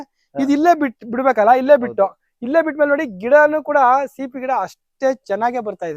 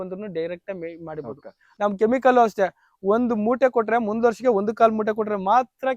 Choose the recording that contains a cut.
second; 1 cut; at 1.7 s

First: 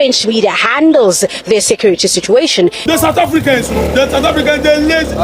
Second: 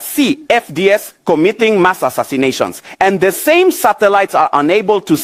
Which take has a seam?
first; 1 cut; at 2.8 s

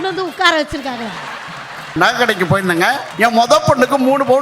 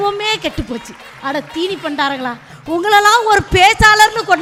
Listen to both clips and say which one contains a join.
first; 2 cuts; at 1.9 s, 3.1 s

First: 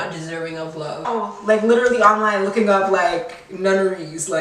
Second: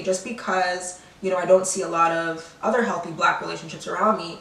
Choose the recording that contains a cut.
first; 1 cut; at 1.1 s

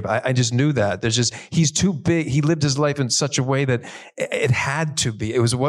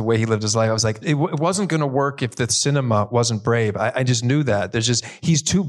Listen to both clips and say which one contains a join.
second; 1 cut; at 1.0 s

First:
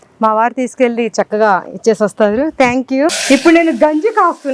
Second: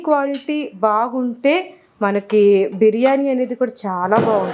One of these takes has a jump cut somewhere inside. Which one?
first; 1 cut; at 3.2 s

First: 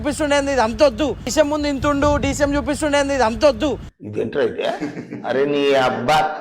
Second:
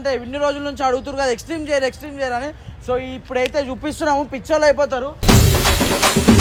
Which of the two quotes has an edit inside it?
first; 2 cuts; at 1.3 s, 3.8 s

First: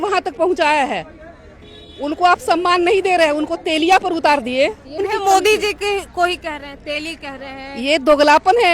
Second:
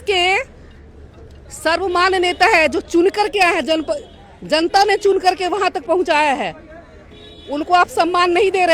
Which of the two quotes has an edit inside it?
first; 1 cut; at 5.0 s

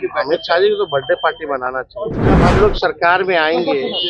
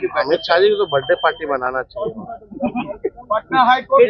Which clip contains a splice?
first; 1 cut; at 2.4 s

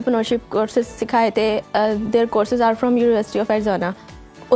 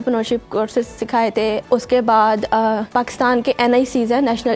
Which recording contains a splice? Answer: second; 2 cuts; at 1.6 s, 2.8 s

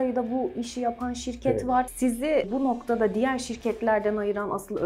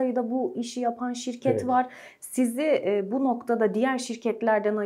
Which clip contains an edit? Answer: first; 1 cut; at 2.4 s

